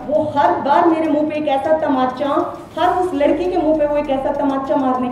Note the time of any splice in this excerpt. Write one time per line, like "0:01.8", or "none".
none